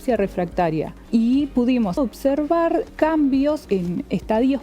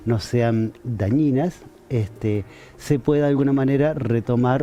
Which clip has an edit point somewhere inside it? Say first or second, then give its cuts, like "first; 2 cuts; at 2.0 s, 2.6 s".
first; 4 cuts; at 1.0 s, 2.0 s, 2.9 s, 3.6 s